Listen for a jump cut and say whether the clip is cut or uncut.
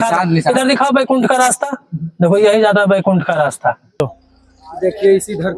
cut